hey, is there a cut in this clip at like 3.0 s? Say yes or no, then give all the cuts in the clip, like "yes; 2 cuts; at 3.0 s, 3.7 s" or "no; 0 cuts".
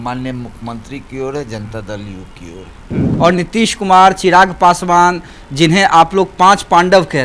yes; 1 cut; at 3.0 s